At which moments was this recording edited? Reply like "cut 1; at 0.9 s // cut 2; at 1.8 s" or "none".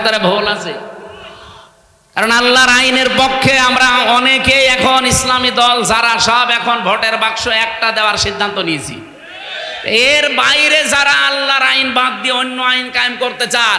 none